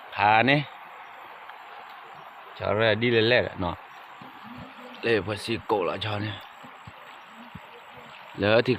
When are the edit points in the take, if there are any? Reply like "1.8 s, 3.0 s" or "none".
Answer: none